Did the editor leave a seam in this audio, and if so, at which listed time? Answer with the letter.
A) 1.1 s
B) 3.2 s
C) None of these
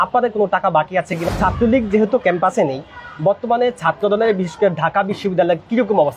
A